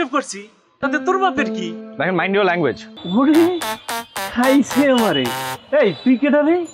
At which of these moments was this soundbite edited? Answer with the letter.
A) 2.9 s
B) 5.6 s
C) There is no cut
A